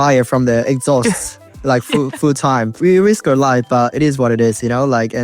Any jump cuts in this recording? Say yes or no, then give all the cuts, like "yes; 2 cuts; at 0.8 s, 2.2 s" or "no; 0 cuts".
yes; 1 cut; at 2.8 s